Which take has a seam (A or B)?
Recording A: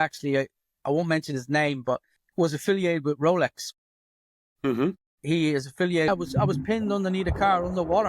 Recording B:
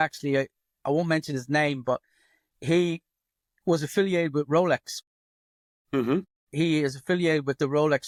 A